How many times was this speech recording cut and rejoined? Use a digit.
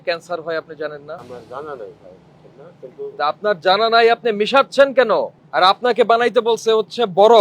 2